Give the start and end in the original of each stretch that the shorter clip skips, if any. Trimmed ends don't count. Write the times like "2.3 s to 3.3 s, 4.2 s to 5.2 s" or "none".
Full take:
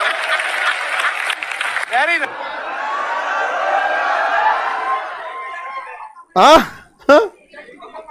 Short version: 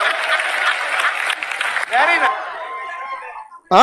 2.1 s to 4.8 s